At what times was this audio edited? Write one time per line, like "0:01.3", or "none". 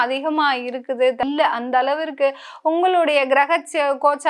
0:01.2